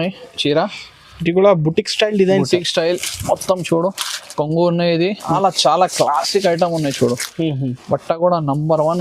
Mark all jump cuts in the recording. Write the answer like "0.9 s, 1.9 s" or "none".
5.3 s